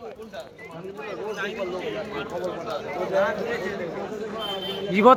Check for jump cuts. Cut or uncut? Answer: uncut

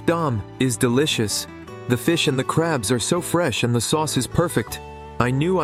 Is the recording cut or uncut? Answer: uncut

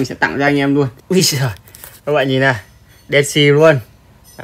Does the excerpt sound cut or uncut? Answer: cut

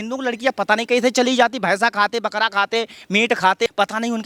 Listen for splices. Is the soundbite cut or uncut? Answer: uncut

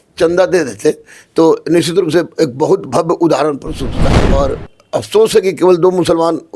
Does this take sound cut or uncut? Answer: cut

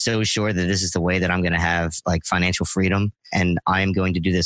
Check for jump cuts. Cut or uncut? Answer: cut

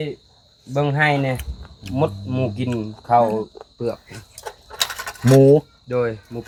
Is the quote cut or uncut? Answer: uncut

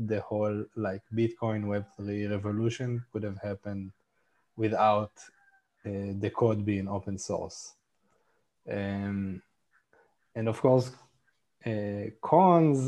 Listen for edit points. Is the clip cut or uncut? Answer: uncut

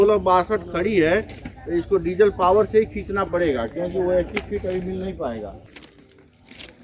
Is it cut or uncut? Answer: cut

